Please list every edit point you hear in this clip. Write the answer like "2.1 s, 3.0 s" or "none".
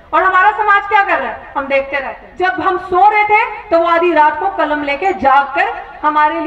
2.2 s